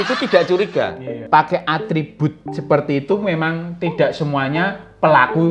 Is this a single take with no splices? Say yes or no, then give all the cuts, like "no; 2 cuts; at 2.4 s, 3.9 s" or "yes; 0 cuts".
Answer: no; 1 cut; at 1.1 s